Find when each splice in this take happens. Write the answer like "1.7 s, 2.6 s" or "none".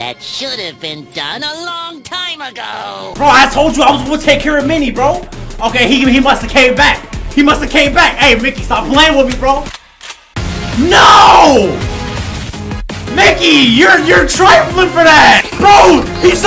9.7 s, 15.5 s